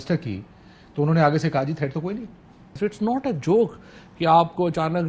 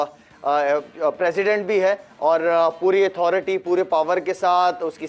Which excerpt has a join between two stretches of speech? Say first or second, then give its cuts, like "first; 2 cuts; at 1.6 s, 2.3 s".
first; 1 cut; at 2.7 s